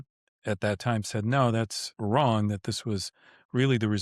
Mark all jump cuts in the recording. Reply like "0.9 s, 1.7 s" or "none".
1.8 s

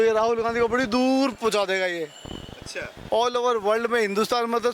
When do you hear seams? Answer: none

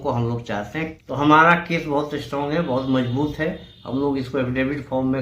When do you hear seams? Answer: 0.9 s

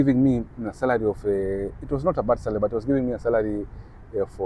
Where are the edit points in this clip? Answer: none

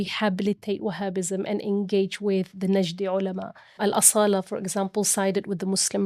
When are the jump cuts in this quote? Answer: 3.8 s

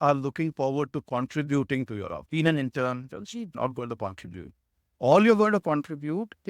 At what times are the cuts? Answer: 2.2 s, 3.6 s

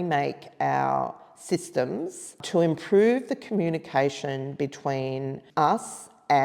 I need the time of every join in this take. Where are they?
2.4 s, 5.4 s

